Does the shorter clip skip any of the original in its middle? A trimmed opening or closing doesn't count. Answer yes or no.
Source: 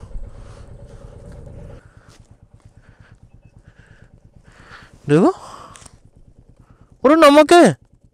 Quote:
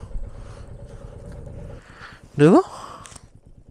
yes